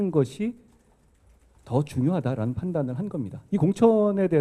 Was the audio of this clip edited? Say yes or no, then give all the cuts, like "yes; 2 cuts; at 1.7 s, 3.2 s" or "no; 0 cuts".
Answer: yes; 1 cut; at 3.4 s